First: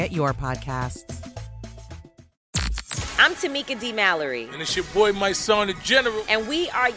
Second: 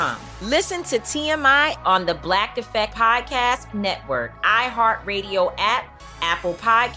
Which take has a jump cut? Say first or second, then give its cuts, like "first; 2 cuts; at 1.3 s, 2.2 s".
first; 1 cut; at 2.4 s